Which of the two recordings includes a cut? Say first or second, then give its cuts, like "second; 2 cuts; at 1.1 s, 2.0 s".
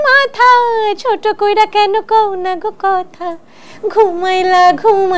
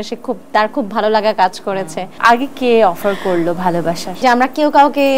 second; 2 cuts; at 2.1 s, 4.2 s